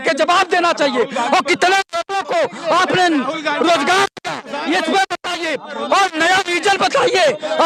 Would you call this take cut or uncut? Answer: uncut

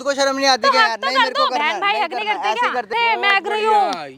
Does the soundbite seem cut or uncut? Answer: cut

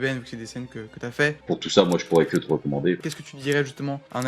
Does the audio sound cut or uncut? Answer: cut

